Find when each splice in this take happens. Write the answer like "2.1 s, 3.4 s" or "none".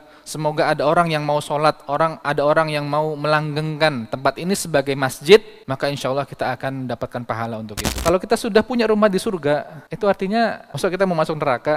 8.0 s